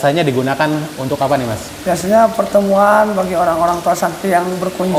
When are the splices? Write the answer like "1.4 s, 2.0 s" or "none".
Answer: none

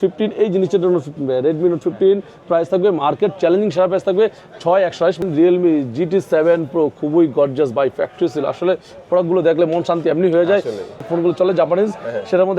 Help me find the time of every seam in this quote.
5.2 s, 11.1 s

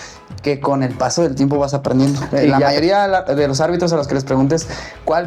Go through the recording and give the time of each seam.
2.7 s

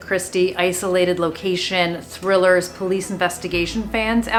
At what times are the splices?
none

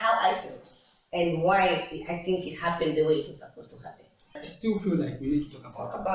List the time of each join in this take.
4.3 s

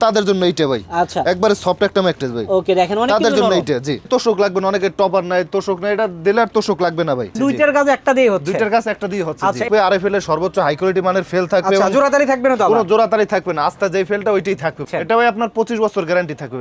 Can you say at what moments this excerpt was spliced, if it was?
4.1 s, 7.4 s, 9.7 s, 14.8 s

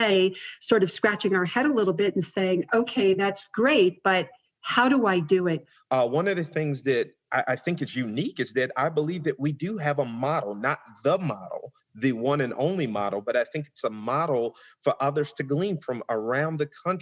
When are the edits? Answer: 5.7 s

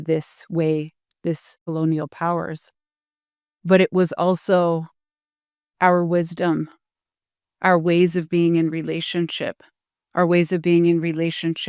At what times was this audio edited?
1.6 s

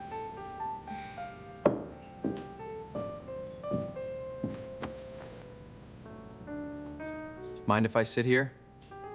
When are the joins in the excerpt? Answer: none

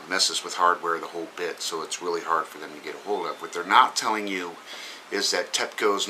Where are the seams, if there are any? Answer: 1.6 s

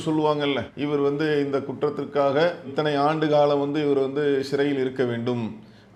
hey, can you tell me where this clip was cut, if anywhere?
none

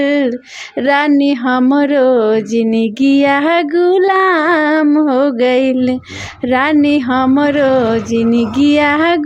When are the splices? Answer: none

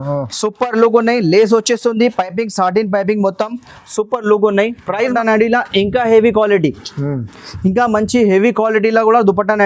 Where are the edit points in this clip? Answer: 5.1 s

